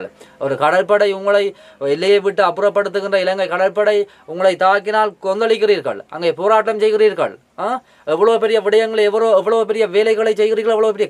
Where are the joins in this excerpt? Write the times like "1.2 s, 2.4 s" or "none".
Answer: none